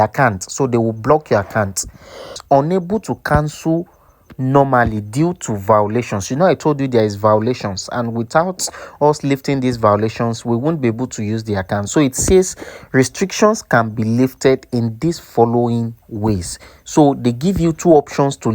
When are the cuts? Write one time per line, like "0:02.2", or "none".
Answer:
0:02.3